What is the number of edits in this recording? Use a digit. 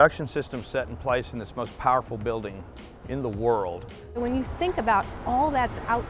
1